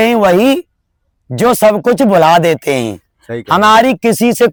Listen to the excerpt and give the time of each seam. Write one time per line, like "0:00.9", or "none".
none